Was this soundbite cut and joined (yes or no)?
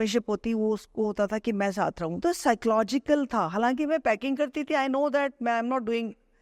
yes